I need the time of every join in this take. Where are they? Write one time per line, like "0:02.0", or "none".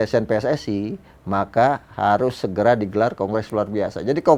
none